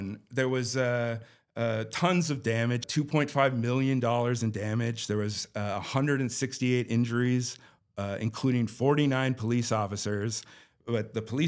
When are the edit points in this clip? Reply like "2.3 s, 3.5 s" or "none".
2.9 s